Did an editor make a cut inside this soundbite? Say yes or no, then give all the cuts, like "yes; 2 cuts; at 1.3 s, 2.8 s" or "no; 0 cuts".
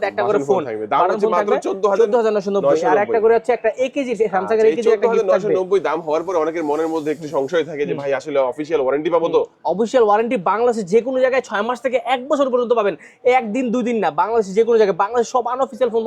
no; 0 cuts